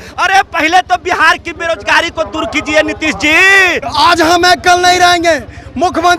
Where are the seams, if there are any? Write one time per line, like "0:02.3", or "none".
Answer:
0:03.8